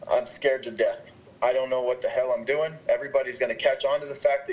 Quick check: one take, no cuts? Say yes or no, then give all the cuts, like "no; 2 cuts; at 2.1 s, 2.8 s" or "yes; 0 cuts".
no; 1 cut; at 1.3 s